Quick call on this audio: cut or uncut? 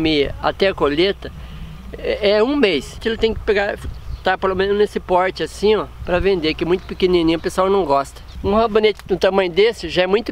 cut